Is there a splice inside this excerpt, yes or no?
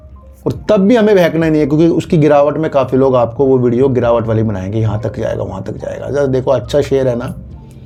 no